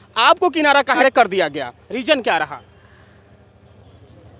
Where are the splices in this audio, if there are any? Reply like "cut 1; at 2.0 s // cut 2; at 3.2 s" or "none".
cut 1; at 1.0 s